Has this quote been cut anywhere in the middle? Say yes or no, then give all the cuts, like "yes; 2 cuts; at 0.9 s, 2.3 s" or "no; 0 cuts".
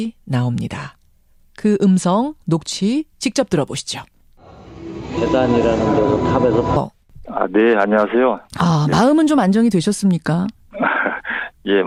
no; 0 cuts